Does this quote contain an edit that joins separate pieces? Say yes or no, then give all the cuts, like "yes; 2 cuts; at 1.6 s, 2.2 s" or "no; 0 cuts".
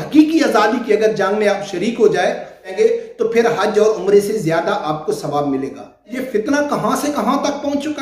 yes; 2 cuts; at 2.7 s, 6.1 s